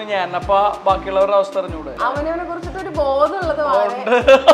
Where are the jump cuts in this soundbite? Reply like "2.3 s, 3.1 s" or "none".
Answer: 1.9 s